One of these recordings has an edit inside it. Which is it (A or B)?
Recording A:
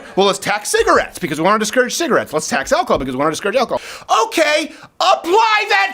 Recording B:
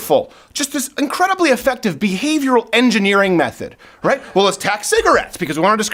A